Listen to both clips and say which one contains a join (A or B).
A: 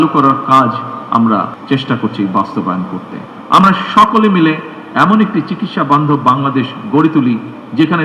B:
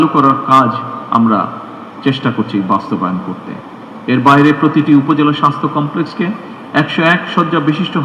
A